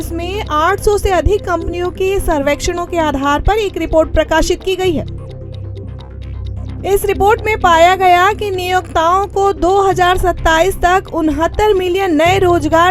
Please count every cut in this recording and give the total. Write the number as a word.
two